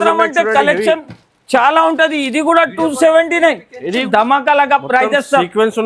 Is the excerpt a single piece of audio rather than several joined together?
no; 1 cut; at 4.0 s

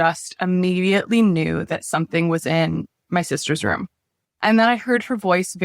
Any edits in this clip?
yes; 1 cut; at 4.3 s

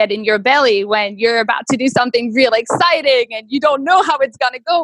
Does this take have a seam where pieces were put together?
no; 0 cuts

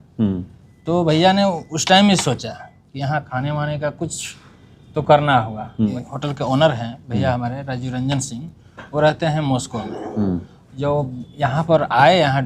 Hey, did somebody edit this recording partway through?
yes; 1 cut; at 5.9 s

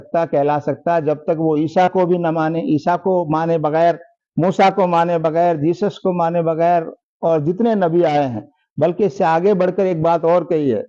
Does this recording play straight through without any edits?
yes; 0 cuts

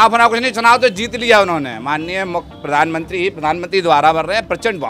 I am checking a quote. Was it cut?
no; 0 cuts

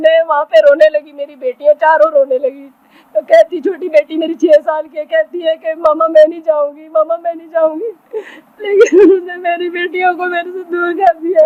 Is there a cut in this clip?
no; 0 cuts

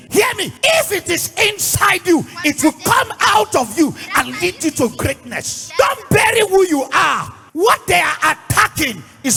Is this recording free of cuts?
yes; 0 cuts

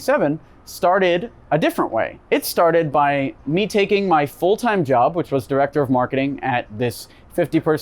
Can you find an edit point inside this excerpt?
yes; 2 cuts; at 1.3 s, 2.2 s

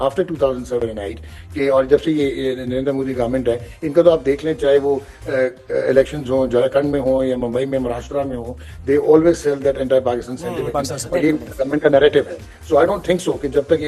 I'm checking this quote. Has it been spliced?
no; 0 cuts

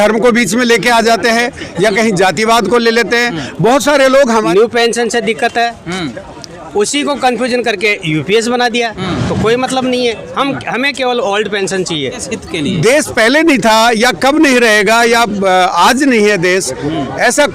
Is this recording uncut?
no; 2 cuts; at 4.5 s, 12.3 s

